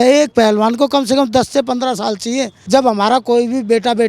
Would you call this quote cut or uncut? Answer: cut